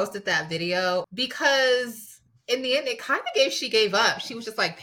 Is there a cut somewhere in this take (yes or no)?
yes